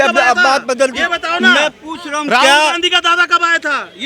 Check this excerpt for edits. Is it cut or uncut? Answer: uncut